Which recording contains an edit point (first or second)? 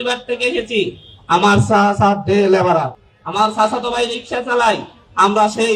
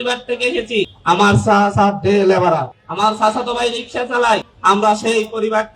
second